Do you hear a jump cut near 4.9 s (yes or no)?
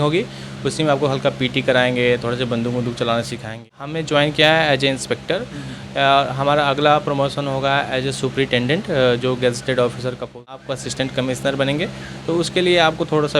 no